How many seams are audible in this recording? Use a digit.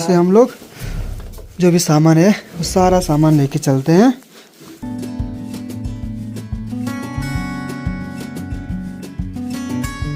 0